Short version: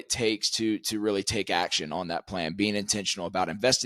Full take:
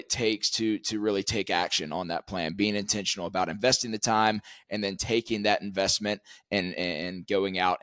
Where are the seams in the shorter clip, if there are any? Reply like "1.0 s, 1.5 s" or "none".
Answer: none